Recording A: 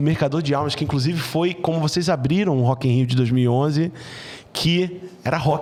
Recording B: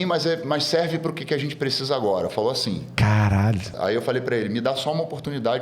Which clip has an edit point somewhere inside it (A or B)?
B